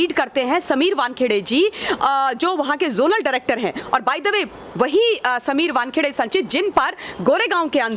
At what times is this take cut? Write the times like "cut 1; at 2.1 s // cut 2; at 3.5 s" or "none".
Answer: none